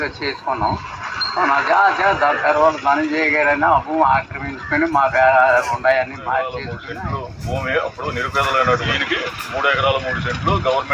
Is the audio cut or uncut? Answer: cut